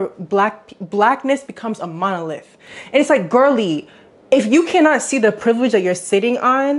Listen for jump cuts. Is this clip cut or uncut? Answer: cut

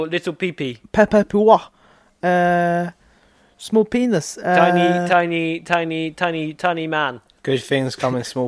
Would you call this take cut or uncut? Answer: cut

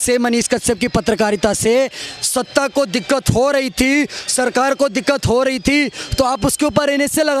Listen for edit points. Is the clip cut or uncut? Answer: uncut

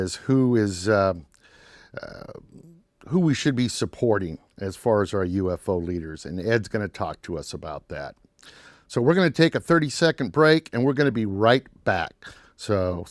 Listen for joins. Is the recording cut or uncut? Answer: uncut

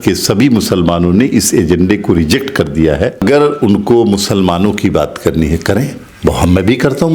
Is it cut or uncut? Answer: cut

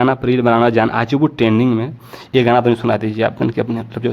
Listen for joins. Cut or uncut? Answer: uncut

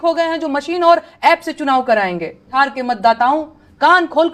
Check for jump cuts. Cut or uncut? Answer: cut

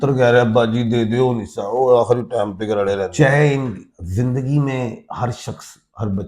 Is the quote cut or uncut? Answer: cut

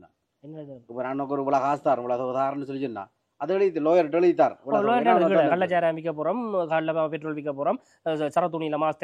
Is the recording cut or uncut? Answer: uncut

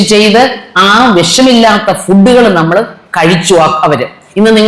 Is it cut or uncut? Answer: uncut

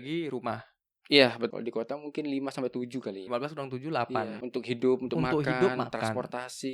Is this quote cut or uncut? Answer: cut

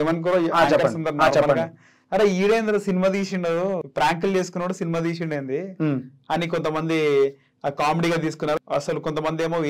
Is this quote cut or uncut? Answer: cut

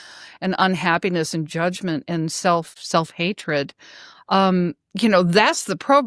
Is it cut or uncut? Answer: cut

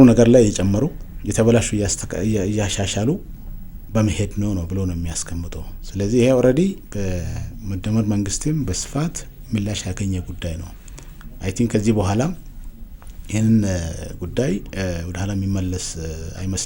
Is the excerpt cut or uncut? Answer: uncut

